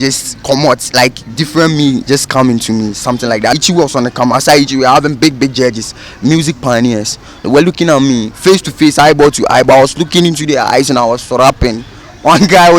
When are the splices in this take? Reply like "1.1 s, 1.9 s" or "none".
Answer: 3.6 s